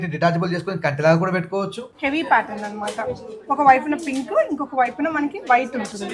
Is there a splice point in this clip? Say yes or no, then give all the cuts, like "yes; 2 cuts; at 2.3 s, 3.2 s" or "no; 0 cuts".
yes; 1 cut; at 1.8 s